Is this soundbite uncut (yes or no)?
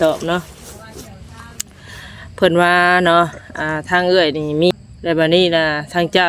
no